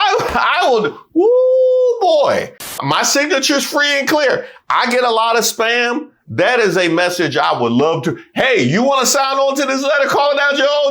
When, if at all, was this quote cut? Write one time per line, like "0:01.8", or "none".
0:02.8